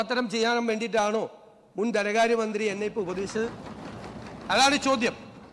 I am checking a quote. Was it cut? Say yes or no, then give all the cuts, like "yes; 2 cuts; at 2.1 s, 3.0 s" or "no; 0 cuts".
no; 0 cuts